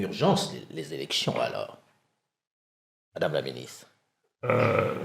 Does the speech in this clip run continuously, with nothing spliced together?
yes; 0 cuts

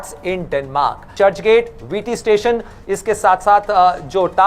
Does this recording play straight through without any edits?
no; 1 cut; at 1.0 s

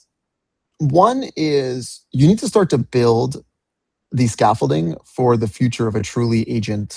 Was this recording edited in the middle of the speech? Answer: no; 0 cuts

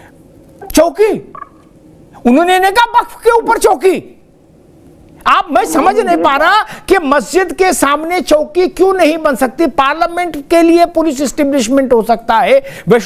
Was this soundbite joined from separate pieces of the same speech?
no; 0 cuts

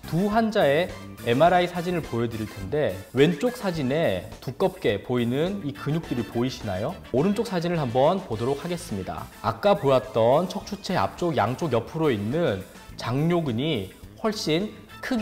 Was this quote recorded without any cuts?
yes; 0 cuts

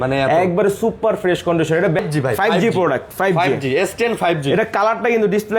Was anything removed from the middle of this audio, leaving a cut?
yes; 1 cut; at 2.0 s

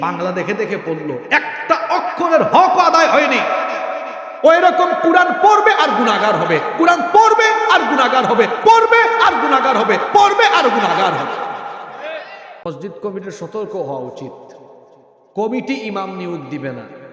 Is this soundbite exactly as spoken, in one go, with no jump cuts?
no; 1 cut; at 12.7 s

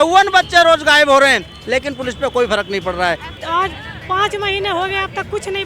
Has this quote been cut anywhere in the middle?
yes; 1 cut; at 3.4 s

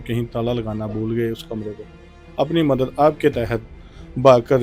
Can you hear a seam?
no; 0 cuts

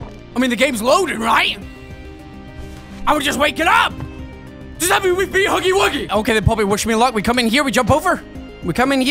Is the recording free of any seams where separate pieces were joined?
no; 1 cut; at 6.0 s

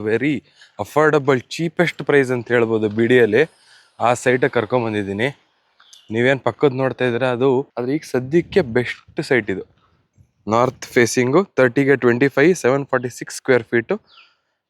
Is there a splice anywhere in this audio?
yes; 1 cut; at 7.7 s

